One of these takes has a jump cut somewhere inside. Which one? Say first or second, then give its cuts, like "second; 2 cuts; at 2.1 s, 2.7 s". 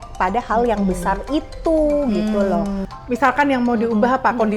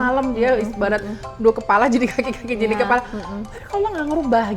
first; 1 cut; at 2.9 s